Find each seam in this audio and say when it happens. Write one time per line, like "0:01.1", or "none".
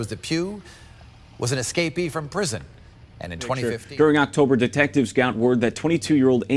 0:03.7